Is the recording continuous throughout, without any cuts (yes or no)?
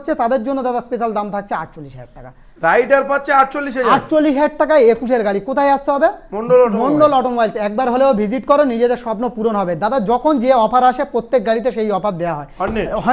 yes